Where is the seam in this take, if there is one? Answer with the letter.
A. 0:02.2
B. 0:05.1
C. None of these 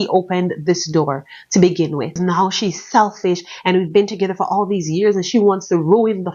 A